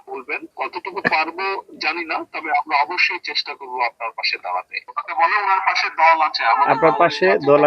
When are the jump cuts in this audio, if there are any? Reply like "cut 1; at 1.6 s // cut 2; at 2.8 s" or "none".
cut 1; at 4.8 s